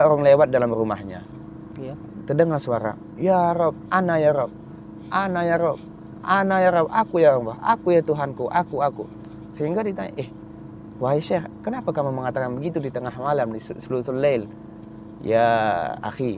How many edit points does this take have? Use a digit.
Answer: 0